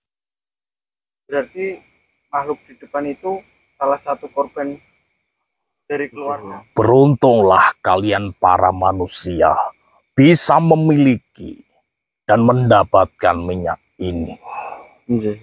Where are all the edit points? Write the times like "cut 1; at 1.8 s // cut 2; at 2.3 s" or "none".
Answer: cut 1; at 6.6 s